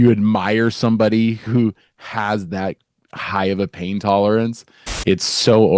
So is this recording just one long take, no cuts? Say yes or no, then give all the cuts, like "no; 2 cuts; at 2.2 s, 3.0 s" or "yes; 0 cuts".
no; 2 cuts; at 1.4 s, 4.8 s